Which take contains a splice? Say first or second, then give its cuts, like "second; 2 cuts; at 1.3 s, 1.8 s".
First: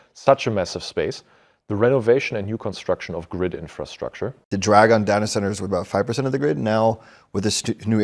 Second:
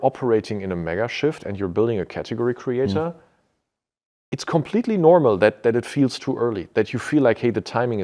first; 1 cut; at 4.4 s